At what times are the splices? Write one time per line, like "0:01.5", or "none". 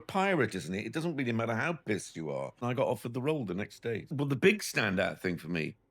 0:02.6
0:04.1